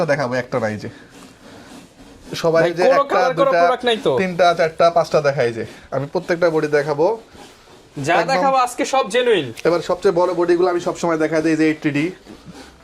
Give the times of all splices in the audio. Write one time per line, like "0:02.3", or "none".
none